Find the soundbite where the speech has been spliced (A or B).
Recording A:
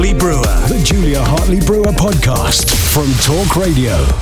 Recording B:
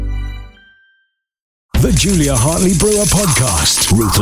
B